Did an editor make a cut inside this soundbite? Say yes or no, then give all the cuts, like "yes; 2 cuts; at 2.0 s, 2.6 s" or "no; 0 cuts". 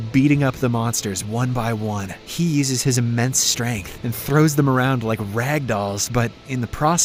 no; 0 cuts